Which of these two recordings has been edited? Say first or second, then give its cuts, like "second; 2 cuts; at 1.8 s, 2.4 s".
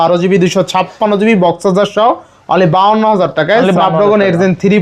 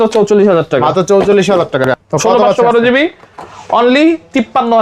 second; 1 cut; at 1.9 s